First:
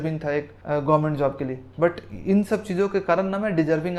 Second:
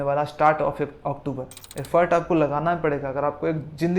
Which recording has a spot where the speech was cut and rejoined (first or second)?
second